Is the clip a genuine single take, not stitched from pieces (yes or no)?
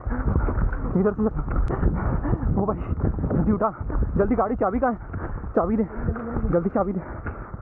no